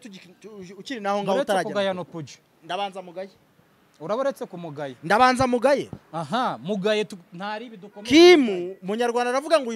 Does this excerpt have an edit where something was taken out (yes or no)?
no